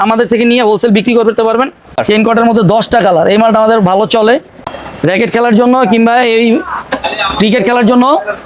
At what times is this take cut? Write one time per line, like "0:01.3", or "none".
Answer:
0:02.0
0:04.5